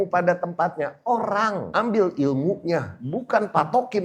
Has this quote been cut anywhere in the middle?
yes; 2 cuts; at 1.7 s, 3.0 s

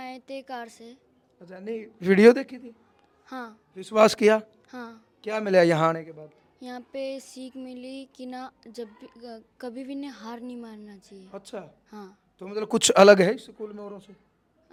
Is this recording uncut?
yes; 0 cuts

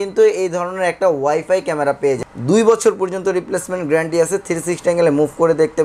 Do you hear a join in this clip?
yes; 1 cut; at 2.2 s

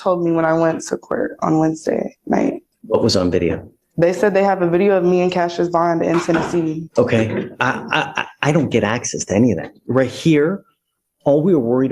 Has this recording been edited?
yes; 2 cuts; at 2.7 s, 6.8 s

